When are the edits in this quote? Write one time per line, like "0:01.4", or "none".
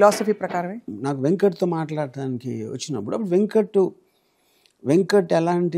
0:00.9